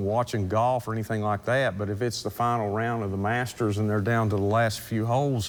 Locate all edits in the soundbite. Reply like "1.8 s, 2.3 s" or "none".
none